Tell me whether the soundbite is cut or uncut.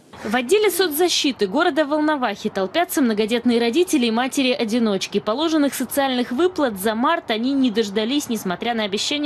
cut